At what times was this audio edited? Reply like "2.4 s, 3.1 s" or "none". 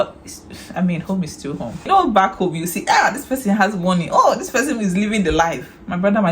1.9 s